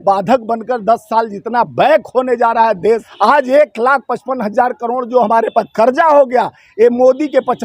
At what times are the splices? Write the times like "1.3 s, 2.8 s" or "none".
3.1 s